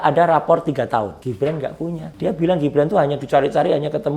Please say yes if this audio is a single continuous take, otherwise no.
no